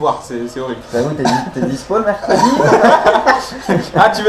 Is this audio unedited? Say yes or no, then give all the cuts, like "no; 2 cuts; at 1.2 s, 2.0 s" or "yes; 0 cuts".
no; 1 cut; at 1.7 s